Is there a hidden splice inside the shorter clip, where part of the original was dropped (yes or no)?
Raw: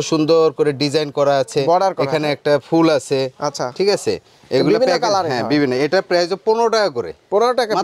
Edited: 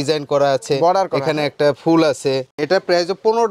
yes